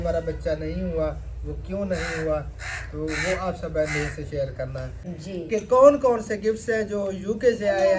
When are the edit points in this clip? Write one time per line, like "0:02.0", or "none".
0:05.2